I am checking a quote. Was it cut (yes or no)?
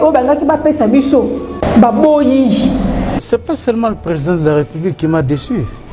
yes